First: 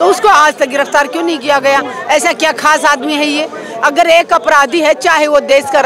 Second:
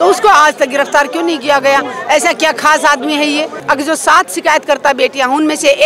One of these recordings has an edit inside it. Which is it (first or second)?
second